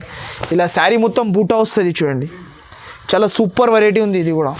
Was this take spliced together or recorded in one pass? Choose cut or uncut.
uncut